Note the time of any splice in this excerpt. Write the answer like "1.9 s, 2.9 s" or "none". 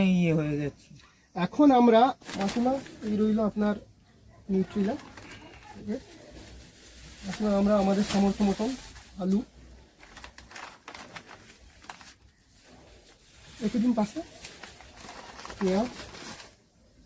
2.2 s